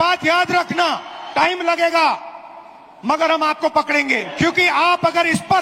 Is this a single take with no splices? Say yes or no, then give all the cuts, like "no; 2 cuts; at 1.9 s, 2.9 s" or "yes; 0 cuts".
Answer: no; 2 cuts; at 1.1 s, 4.3 s